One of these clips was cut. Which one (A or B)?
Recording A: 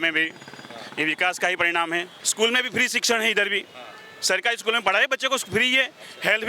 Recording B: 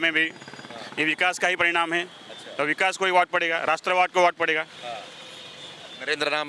A